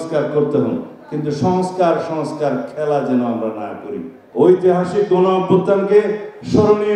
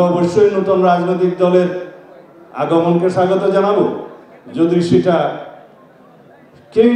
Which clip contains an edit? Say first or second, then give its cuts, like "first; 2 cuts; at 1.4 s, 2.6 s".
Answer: first; 1 cut; at 4.2 s